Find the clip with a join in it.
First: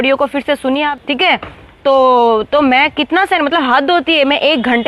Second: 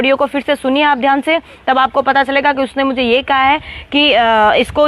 first; 1 cut; at 0.9 s

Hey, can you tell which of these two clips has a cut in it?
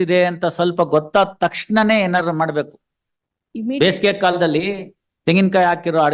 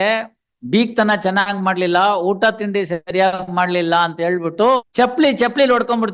second; 1 cut; at 4.9 s

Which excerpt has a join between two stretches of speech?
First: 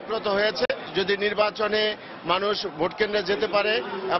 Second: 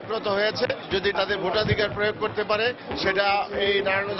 second; 1 cut; at 1.1 s

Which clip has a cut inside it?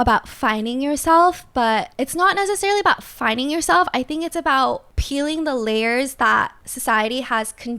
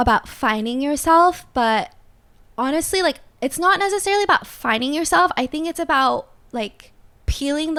first; 3 cuts; at 1.9 s, 4.9 s, 6.7 s

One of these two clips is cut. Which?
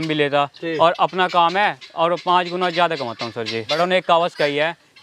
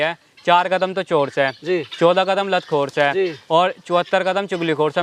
first; 1 cut; at 3.7 s

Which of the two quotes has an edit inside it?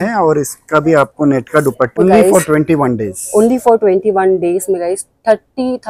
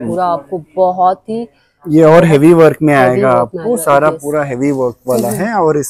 first; 1 cut; at 2.0 s

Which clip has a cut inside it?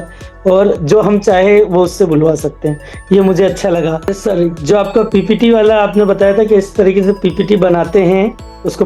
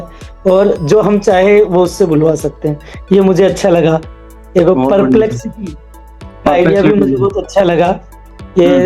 first; 1 cut; at 4.2 s

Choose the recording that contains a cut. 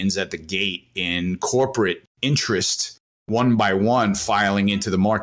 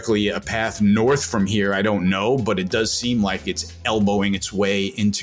first; 2 cuts; at 2.1 s, 3.3 s

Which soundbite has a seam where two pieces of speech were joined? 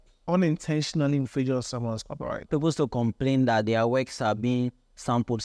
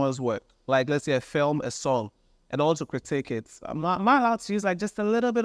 first; 1 cut; at 2.5 s

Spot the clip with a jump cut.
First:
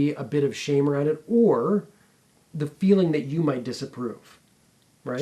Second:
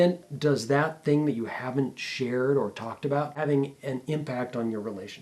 second; 1 cut; at 3.4 s

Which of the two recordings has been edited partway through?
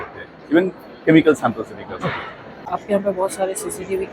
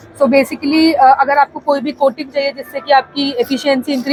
first; 1 cut; at 2.7 s

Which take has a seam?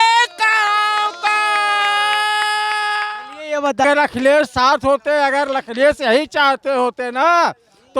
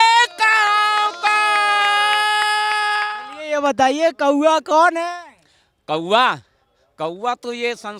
first; 1 cut; at 3.8 s

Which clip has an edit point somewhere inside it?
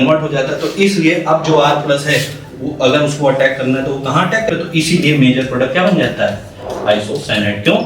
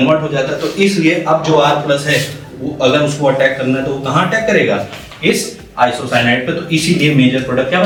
first; 1 cut; at 4.5 s

